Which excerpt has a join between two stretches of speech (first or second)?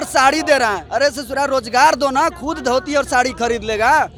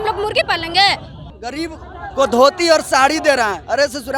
second